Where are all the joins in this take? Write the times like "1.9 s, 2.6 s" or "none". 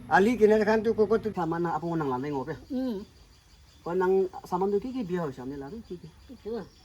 1.3 s

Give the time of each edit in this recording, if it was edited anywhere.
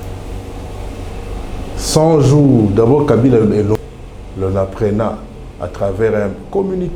3.8 s

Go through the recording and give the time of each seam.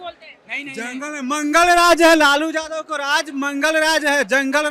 none

